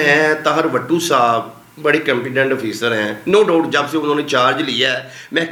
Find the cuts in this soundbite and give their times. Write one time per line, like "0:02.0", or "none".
none